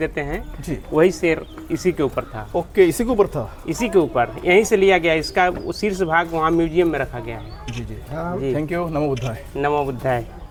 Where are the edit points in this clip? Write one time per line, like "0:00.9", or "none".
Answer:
none